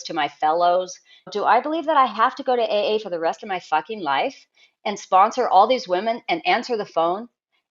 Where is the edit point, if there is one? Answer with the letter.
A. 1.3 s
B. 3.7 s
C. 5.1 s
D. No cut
A